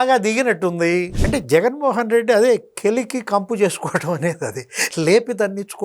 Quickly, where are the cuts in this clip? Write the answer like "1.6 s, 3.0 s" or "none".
1.2 s